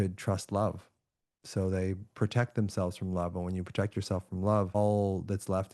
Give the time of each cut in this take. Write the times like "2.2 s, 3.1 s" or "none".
4.7 s